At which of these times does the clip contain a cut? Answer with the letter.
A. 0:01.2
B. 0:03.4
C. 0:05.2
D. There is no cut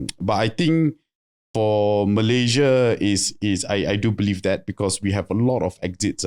D